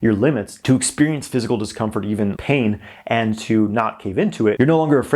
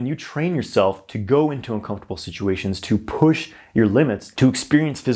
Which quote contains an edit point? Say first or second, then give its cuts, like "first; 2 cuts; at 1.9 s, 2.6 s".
first; 1 cut; at 2.4 s